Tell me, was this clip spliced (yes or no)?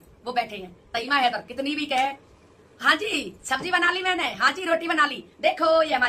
yes